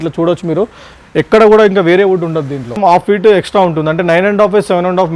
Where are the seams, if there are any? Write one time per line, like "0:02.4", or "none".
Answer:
0:02.8